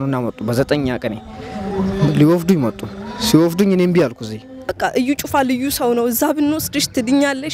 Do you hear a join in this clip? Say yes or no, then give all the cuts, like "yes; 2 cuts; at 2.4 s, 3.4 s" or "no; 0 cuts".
yes; 1 cut; at 4.8 s